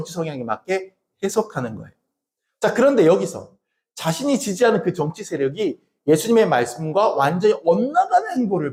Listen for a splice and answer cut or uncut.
uncut